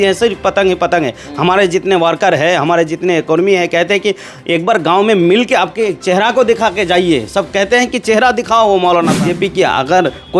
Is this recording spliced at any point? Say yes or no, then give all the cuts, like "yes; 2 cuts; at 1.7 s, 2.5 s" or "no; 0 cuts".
yes; 1 cut; at 9.2 s